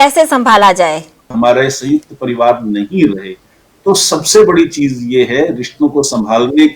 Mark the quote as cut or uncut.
cut